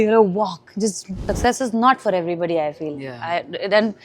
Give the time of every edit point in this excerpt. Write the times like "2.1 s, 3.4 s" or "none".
1.3 s